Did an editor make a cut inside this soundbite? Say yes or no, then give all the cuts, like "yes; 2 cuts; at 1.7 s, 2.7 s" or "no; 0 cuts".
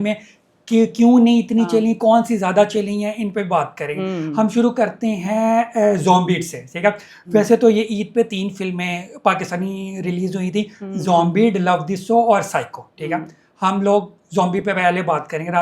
no; 0 cuts